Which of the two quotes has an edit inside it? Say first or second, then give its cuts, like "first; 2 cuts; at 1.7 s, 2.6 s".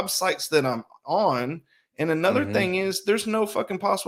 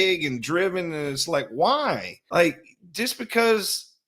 second; 1 cut; at 2.1 s